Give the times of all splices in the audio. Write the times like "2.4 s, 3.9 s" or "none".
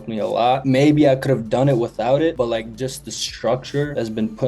2.3 s